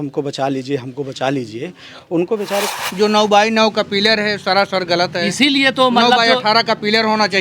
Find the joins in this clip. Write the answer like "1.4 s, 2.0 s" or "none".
2.7 s